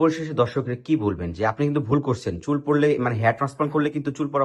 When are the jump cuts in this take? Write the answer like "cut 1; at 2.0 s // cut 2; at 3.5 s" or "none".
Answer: none